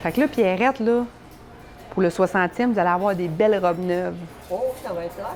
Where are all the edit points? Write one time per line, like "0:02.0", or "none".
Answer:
none